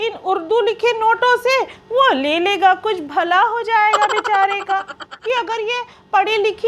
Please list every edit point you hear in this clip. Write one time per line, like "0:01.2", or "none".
0:05.1